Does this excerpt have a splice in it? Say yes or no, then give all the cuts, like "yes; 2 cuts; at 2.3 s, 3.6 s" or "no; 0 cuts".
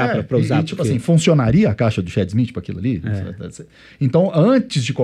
no; 0 cuts